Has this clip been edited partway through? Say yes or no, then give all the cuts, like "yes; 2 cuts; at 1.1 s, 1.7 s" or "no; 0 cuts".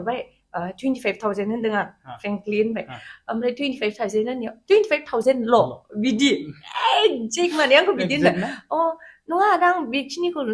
no; 0 cuts